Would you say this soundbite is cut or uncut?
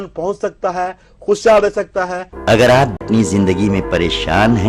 cut